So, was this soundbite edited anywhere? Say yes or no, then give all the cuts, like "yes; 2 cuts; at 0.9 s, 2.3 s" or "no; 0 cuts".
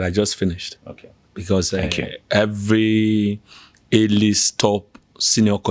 no; 0 cuts